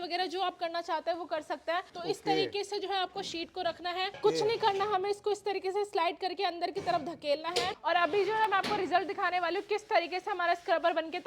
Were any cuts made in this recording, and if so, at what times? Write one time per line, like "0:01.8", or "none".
0:01.9
0:04.1
0:07.8